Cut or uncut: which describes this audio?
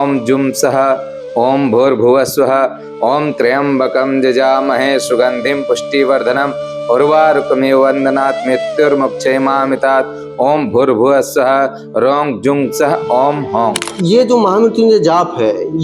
cut